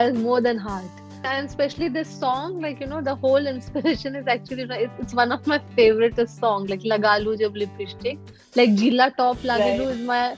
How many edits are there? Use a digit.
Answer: 1